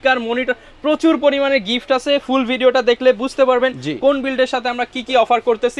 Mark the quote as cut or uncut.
uncut